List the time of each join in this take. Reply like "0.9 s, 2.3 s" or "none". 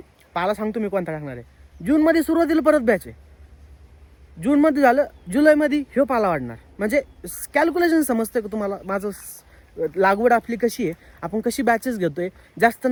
none